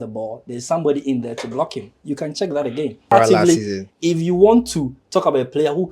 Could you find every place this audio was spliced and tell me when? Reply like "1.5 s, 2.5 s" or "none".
3.1 s

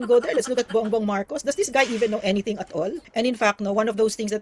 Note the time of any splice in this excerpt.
3.0 s

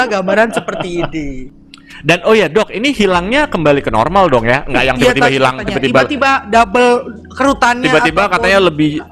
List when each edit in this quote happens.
1.4 s

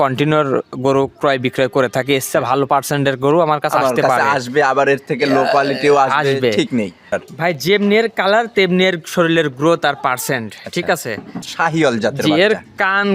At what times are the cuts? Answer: 7.1 s, 11.4 s

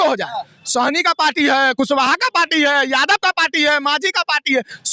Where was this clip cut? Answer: none

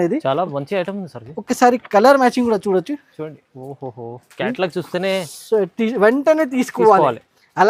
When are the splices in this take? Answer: none

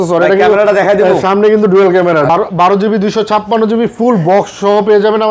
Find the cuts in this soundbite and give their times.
2.3 s

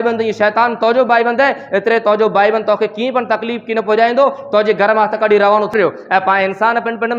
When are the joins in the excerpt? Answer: 5.7 s

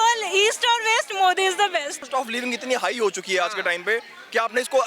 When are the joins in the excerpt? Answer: 2.0 s

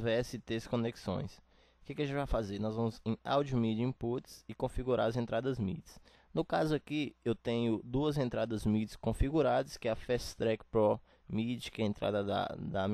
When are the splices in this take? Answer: none

